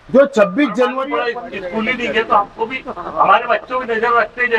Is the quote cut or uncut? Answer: cut